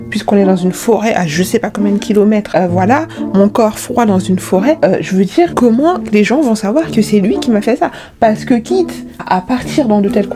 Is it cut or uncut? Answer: uncut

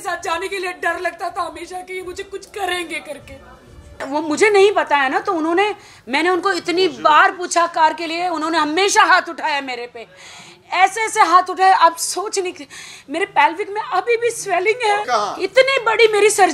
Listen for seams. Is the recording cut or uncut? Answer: cut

